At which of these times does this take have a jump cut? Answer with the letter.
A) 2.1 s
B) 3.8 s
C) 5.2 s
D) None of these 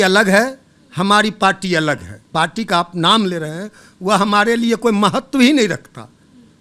A